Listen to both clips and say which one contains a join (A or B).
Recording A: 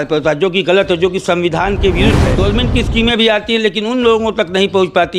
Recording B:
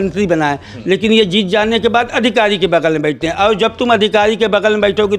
A